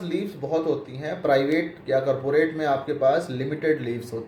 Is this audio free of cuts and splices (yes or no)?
yes